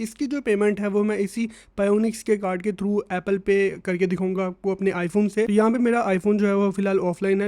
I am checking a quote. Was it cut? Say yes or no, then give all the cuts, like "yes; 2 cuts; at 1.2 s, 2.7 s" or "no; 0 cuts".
yes; 1 cut; at 5.5 s